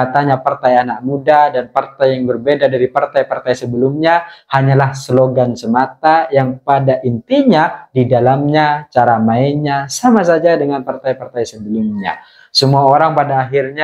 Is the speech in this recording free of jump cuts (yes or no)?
yes